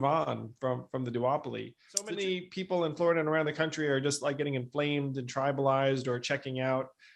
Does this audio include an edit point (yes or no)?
yes